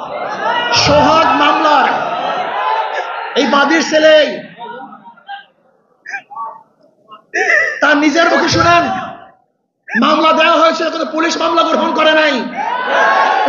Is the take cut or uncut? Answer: uncut